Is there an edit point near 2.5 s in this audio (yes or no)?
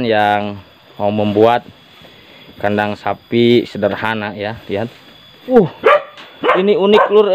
no